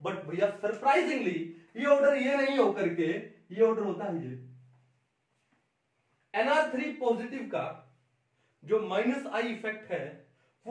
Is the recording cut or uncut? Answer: uncut